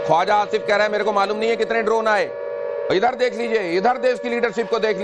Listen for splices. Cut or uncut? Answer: uncut